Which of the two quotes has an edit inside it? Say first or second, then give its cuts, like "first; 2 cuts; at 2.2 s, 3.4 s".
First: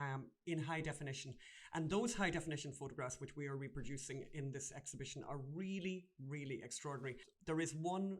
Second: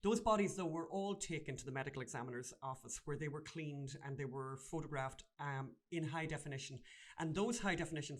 first; 1 cut; at 7.3 s